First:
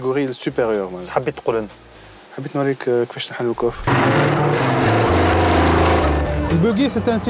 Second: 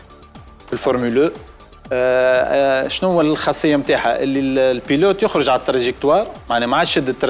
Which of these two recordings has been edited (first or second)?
first